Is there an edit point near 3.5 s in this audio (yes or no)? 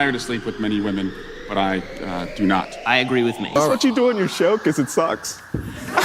yes